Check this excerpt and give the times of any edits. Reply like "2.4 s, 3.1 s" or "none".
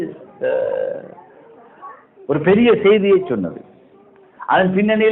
none